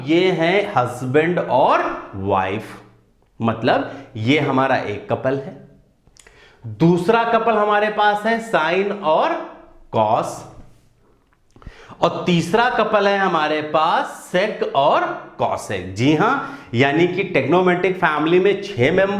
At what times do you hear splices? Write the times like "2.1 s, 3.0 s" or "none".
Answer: none